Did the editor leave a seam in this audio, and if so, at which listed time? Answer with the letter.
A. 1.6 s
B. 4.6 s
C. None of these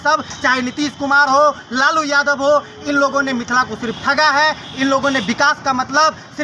C